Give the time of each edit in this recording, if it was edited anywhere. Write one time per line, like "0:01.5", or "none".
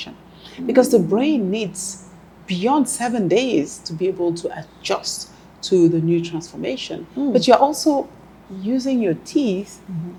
none